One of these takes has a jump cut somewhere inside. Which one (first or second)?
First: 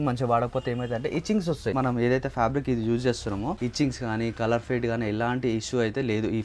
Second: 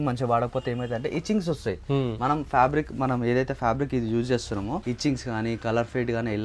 first